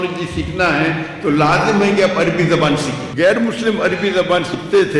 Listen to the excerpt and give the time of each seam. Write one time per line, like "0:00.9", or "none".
0:03.1